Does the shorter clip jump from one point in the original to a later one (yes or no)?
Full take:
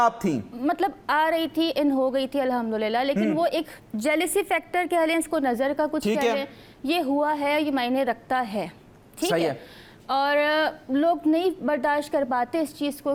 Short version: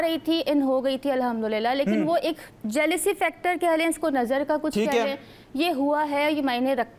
no